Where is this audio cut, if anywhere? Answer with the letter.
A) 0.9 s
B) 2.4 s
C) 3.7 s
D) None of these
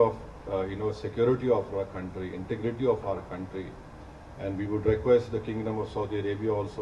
D